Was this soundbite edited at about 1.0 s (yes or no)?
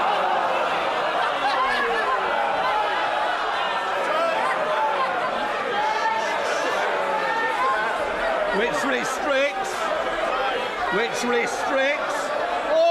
no